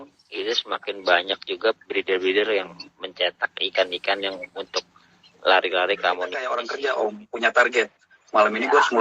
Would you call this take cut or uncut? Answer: cut